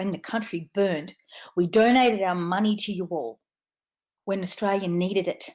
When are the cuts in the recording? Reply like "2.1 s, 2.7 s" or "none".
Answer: none